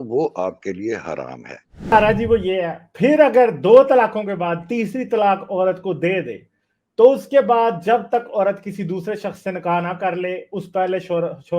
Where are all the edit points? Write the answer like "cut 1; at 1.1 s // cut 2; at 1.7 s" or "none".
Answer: cut 1; at 1.9 s